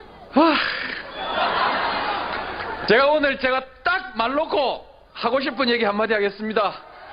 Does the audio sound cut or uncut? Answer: uncut